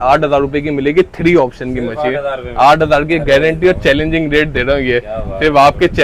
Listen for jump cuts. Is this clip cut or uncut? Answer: uncut